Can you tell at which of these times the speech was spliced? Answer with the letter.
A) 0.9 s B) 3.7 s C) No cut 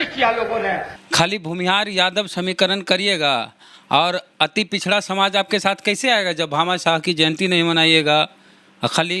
A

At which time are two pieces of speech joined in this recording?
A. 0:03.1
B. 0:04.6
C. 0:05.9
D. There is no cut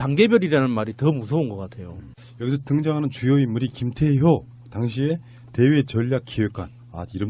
A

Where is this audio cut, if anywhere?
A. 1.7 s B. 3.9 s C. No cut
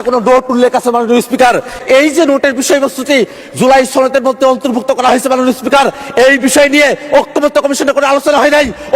A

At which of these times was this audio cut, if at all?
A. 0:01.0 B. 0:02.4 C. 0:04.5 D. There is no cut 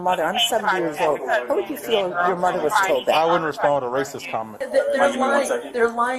C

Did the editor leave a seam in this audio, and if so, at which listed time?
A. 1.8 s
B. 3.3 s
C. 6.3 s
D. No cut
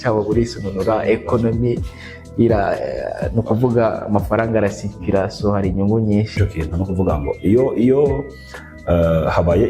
C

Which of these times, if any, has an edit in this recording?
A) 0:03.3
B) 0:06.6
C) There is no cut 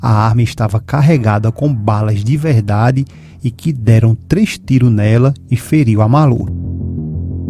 B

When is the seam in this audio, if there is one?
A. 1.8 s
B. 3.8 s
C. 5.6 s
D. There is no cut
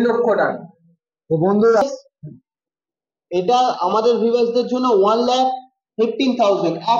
A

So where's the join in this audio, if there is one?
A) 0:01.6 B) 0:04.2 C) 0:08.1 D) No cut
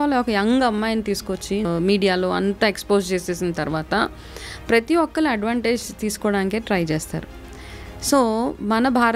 A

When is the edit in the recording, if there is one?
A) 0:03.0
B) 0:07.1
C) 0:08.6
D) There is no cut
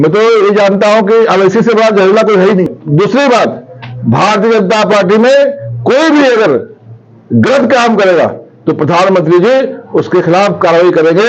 D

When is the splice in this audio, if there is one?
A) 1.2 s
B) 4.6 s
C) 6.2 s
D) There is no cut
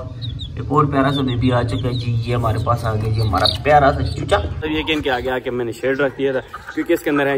B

